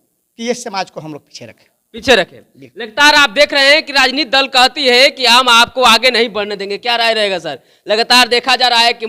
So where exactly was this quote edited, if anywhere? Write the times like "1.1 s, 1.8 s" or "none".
none